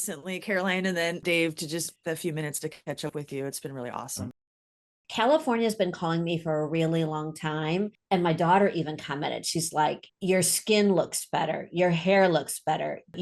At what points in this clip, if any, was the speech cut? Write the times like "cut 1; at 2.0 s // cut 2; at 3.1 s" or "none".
cut 1; at 1.9 s // cut 2; at 4.9 s